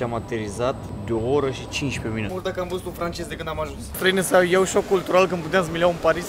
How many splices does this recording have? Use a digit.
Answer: 3